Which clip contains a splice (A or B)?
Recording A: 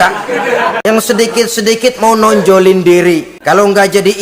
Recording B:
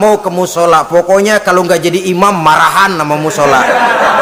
A